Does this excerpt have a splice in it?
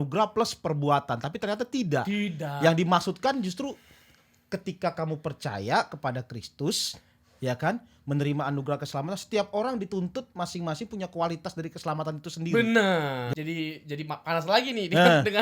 yes; 1 cut; at 13.3 s

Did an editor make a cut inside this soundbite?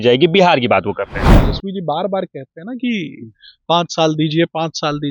yes; 1 cut; at 1.2 s

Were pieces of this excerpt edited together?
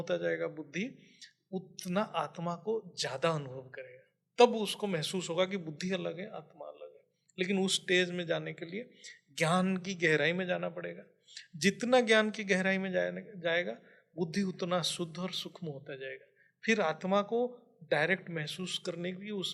no; 0 cuts

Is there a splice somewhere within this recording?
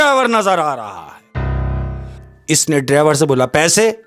yes; 1 cut; at 2.1 s

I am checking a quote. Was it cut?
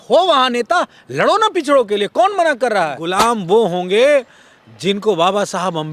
yes; 1 cut; at 3.0 s

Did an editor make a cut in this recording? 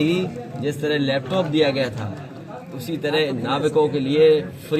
no; 0 cuts

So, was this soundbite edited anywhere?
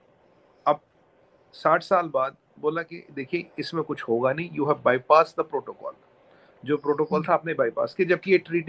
no; 0 cuts

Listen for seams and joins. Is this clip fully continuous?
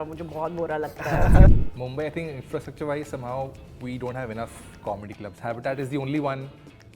no; 1 cut; at 1.5 s

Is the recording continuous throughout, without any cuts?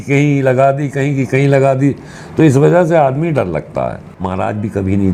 no; 1 cut; at 4.1 s

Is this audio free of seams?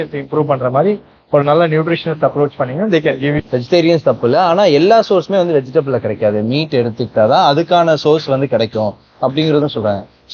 no; 1 cut; at 3.4 s

